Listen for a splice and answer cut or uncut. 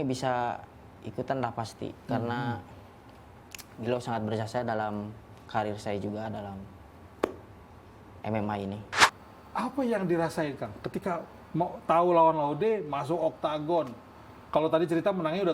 cut